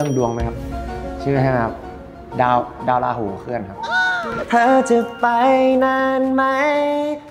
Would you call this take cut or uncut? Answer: cut